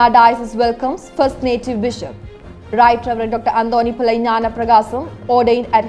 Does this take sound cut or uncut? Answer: uncut